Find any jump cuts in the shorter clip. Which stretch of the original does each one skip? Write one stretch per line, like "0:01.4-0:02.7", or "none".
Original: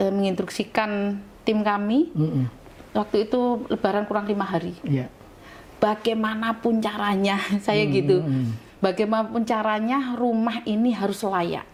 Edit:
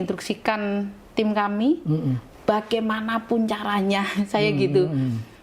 0:02.6-0:05.6